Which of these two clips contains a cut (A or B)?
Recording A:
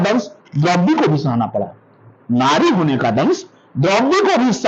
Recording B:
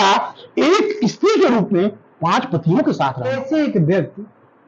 B